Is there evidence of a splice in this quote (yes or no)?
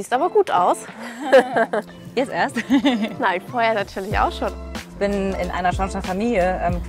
yes